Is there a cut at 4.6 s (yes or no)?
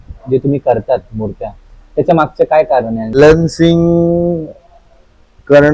no